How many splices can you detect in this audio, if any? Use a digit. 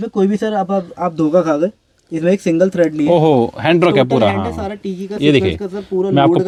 0